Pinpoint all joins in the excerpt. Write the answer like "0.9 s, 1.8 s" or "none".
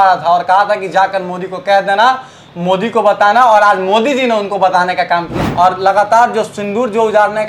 5.3 s